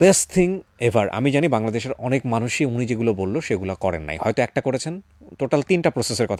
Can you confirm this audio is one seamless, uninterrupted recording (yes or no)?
yes